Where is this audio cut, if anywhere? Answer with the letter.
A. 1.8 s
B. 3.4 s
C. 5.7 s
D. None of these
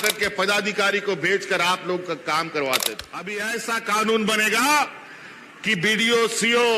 B